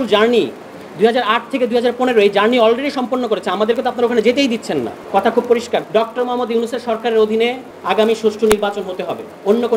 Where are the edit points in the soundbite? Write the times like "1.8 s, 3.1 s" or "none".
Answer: 5.0 s, 5.9 s, 7.7 s

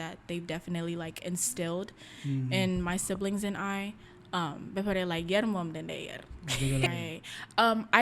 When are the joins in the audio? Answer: 6.9 s

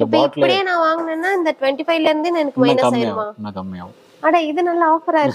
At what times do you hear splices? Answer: none

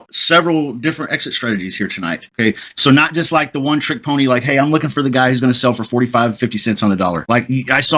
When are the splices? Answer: 2.3 s

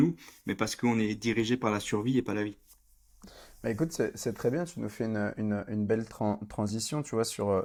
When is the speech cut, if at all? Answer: none

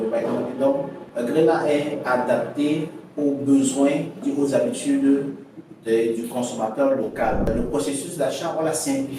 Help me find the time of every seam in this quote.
1.0 s, 4.2 s, 7.5 s

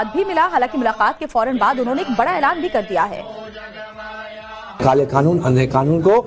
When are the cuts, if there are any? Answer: 3.2 s

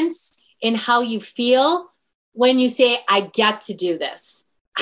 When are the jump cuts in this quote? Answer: none

